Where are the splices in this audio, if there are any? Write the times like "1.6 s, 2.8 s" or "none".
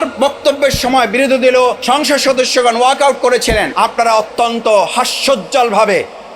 1.8 s, 3.7 s